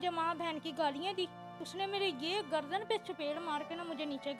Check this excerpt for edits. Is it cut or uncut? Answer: cut